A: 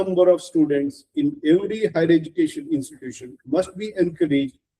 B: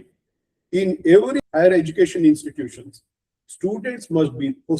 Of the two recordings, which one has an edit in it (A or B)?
B